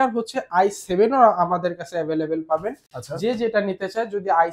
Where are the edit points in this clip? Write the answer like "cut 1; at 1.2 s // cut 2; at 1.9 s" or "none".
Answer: none